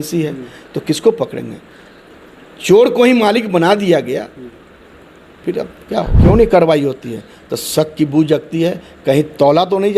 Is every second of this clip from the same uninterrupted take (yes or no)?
no